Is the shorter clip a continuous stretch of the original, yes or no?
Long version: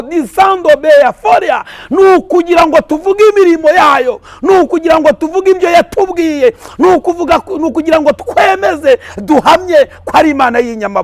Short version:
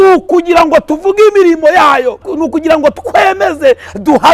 no